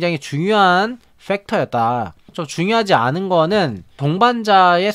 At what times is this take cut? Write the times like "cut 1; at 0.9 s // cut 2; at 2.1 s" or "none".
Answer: cut 1; at 2.4 s